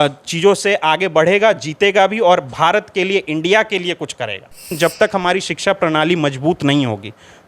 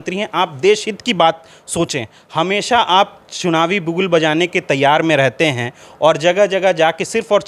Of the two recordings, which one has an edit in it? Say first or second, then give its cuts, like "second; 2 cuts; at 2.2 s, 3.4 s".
first; 1 cut; at 4.7 s